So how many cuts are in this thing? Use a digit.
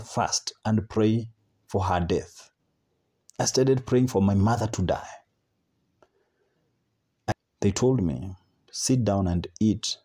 1